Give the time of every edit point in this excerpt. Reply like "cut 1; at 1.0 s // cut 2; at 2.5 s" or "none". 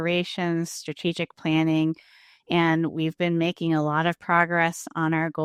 none